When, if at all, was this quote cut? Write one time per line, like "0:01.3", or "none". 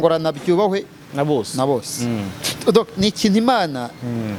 none